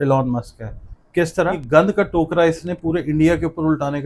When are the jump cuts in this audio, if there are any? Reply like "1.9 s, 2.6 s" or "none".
1.6 s